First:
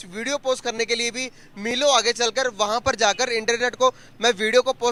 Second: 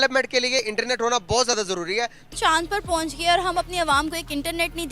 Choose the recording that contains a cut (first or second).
second